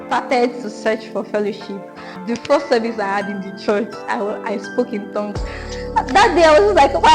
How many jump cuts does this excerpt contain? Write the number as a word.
two